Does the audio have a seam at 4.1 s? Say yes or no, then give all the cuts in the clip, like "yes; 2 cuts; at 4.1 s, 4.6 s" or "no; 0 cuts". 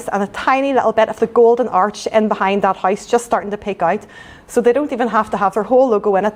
no; 0 cuts